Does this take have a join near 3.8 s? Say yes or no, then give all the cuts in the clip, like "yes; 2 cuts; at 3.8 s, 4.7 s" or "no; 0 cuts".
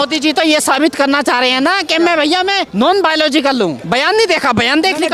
yes; 2 cuts; at 2.7 s, 3.8 s